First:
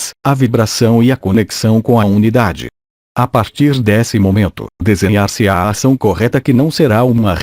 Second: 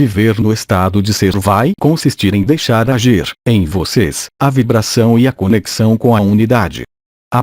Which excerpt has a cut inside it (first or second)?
second